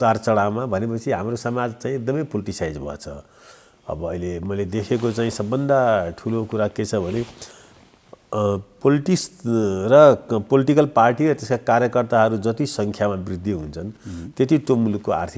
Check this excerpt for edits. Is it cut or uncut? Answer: uncut